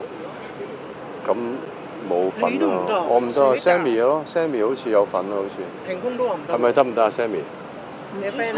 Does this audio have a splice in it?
no; 0 cuts

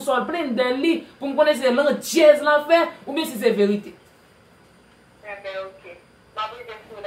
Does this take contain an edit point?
no; 0 cuts

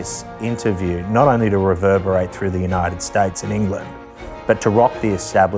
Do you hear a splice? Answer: no; 0 cuts

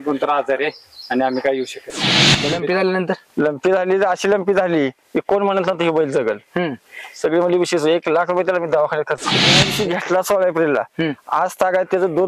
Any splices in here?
yes; 2 cuts; at 2.3 s, 9.6 s

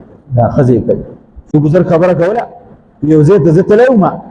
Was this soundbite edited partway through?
yes; 1 cut; at 1.5 s

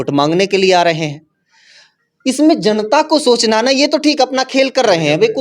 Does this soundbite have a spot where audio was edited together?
no; 0 cuts

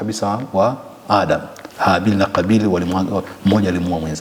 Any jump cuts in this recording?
no; 0 cuts

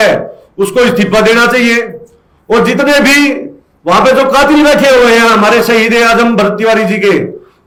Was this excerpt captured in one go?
yes; 0 cuts

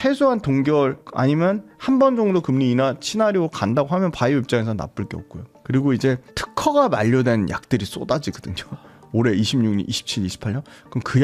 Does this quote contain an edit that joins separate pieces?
no; 0 cuts

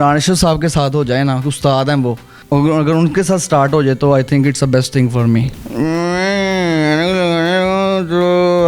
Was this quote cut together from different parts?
yes; 2 cuts; at 2.4 s, 5.6 s

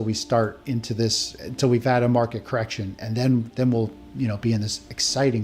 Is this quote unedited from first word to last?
yes; 0 cuts

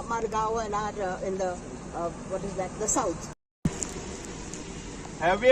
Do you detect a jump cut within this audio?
yes; 1 cut; at 3.5 s

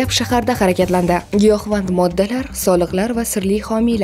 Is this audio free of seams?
no; 1 cut; at 1.2 s

